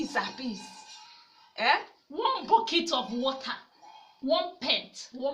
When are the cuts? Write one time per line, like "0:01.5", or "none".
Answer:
none